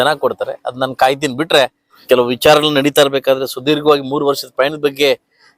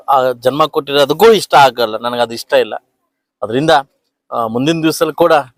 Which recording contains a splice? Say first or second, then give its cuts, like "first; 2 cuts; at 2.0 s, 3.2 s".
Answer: first; 1 cut; at 1.9 s